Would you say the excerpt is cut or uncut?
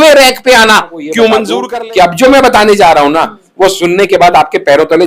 cut